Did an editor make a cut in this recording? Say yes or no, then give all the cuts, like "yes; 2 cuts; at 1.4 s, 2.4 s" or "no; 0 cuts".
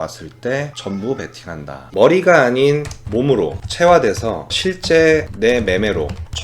yes; 1 cut; at 1.9 s